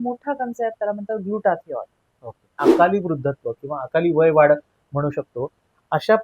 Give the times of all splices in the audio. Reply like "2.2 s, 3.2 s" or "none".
2.5 s